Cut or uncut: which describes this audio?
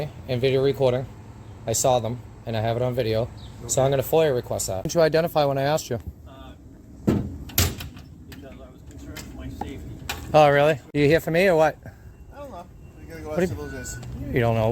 cut